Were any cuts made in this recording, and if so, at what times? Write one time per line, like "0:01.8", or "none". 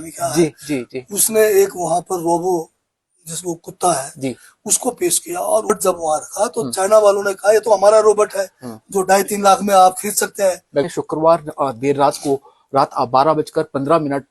0:05.7
0:10.9